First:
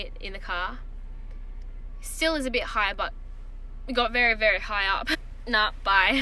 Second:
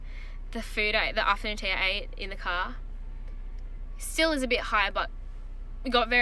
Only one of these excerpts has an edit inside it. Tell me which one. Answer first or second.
first